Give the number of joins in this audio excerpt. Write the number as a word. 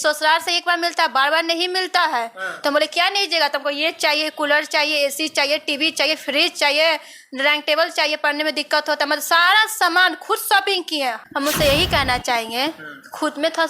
one